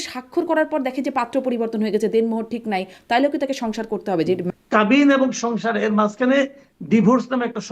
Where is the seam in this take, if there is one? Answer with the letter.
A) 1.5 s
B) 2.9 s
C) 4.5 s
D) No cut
C